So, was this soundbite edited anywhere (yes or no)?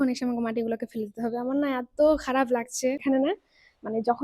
yes